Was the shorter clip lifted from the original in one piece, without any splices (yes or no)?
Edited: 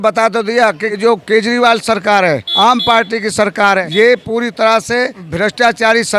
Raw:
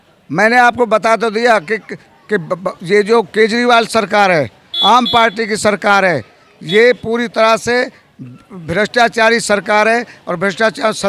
no